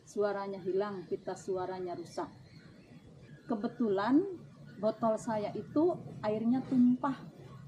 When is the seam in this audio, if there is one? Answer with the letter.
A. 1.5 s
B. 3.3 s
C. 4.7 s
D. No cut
B